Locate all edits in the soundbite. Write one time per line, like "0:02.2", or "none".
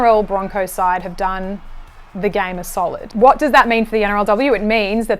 0:03.1

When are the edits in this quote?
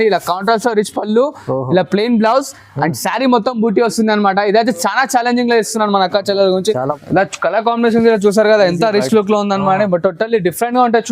0:06.9

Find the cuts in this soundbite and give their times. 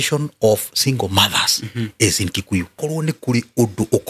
0:02.7

